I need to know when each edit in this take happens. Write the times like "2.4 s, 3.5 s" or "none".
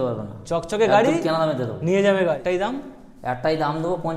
2.4 s